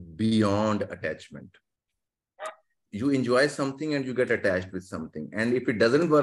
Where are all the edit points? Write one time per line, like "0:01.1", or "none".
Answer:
0:02.9